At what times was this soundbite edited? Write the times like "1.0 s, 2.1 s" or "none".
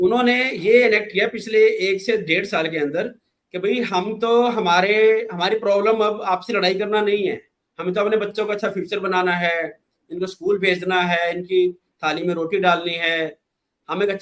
none